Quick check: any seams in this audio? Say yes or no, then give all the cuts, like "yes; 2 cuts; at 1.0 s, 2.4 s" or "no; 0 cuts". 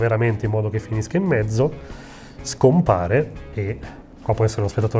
no; 0 cuts